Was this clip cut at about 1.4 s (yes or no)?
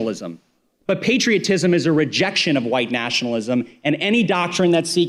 no